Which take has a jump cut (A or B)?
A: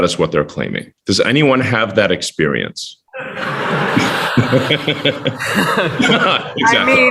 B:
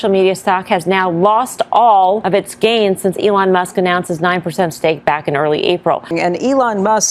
B